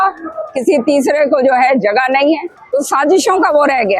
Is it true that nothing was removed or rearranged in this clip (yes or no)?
no